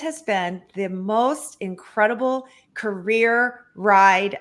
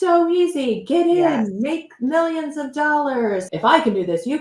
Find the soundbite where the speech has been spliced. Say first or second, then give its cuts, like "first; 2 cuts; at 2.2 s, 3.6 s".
second; 1 cut; at 3.5 s